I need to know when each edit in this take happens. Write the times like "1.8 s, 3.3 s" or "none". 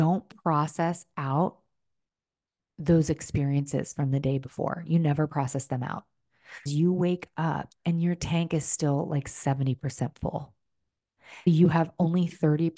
6.7 s